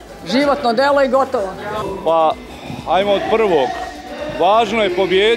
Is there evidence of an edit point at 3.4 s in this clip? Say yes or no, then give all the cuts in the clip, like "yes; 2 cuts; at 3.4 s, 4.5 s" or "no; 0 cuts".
no; 1 cut; at 1.7 s